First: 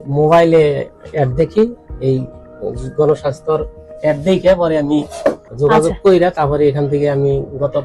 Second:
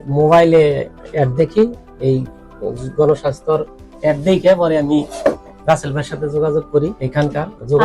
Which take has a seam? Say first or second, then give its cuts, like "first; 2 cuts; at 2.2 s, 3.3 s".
first; 1 cut; at 5.5 s